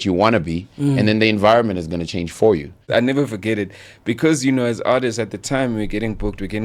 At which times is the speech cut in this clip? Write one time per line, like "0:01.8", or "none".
0:02.8